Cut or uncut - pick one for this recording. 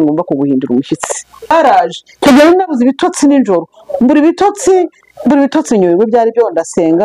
cut